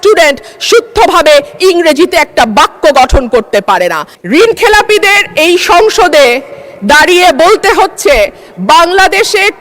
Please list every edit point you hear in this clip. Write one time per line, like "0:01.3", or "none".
0:04.1